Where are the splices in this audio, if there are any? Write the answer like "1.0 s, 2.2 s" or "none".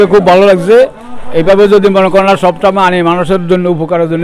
none